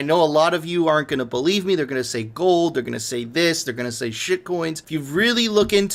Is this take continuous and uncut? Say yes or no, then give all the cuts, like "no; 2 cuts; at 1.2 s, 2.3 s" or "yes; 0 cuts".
yes; 0 cuts